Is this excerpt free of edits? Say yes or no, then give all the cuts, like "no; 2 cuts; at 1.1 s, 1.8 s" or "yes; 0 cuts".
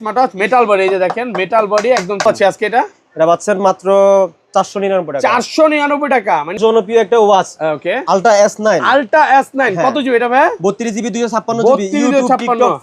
no; 2 cuts; at 2.2 s, 6.6 s